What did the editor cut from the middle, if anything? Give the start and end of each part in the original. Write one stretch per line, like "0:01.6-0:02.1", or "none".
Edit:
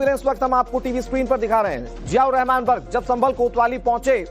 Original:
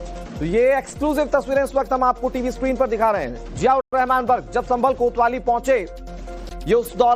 0:03.8-0:03.9